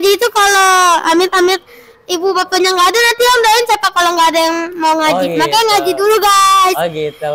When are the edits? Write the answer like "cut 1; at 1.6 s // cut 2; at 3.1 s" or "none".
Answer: none